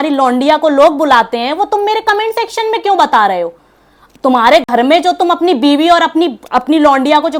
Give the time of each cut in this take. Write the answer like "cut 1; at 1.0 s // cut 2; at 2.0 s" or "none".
none